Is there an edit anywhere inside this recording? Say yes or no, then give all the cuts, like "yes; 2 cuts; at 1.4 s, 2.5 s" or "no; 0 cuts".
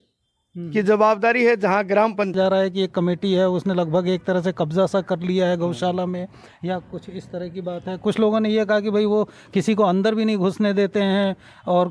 yes; 1 cut; at 2.3 s